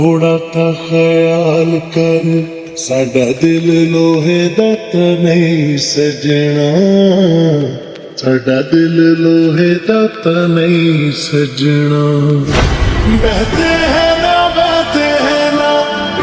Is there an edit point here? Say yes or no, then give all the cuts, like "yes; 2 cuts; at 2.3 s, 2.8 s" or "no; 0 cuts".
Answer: no; 0 cuts